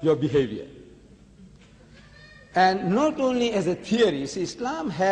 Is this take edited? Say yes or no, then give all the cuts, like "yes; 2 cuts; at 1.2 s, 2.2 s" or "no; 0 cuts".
no; 0 cuts